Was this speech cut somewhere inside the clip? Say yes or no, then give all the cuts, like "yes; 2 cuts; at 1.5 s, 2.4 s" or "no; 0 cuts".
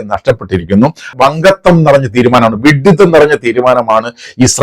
yes; 1 cut; at 1.1 s